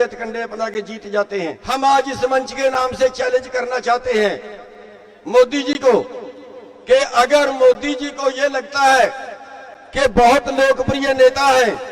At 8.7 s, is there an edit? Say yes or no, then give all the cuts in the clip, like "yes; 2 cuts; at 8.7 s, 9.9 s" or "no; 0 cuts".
no; 1 cut; at 1.6 s